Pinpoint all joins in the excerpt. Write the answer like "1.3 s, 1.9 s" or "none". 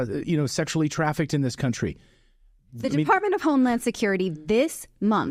none